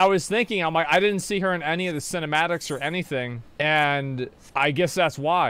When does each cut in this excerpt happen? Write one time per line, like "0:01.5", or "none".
0:03.4
0:04.4